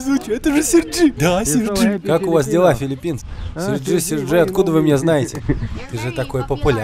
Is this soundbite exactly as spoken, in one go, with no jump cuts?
yes; 0 cuts

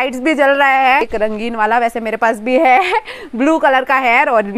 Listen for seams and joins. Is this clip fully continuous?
no; 1 cut; at 1.0 s

